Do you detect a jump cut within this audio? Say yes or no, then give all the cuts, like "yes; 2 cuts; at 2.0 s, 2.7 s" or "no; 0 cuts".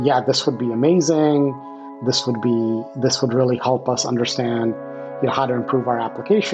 no; 0 cuts